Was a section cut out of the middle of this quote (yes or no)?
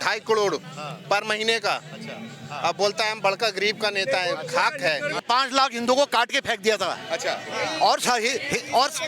yes